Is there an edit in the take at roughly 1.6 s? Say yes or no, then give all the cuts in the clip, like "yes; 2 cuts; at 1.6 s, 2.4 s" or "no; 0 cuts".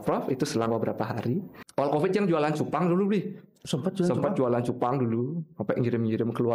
yes; 1 cut; at 1.6 s